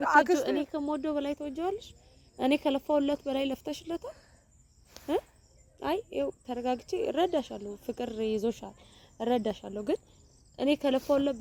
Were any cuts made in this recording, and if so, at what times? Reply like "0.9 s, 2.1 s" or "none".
none